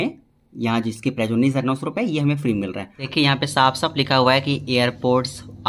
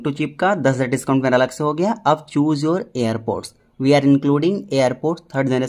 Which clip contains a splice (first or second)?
first